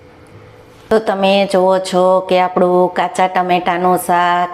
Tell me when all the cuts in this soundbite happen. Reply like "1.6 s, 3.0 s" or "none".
0.9 s